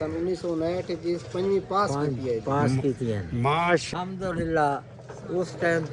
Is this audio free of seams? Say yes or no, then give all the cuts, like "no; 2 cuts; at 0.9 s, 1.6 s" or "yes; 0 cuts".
no; 1 cut; at 3.9 s